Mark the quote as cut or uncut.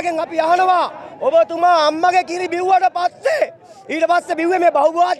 uncut